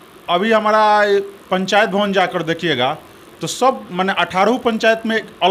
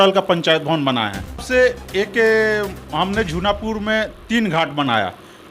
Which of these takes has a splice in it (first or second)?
second